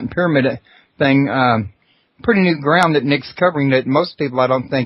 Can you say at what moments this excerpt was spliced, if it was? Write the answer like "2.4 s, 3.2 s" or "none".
none